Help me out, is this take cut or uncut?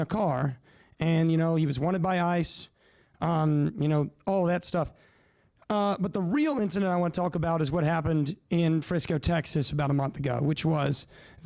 uncut